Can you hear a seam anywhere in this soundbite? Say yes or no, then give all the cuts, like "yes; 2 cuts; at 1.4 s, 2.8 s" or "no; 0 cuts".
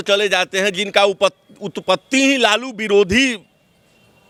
no; 0 cuts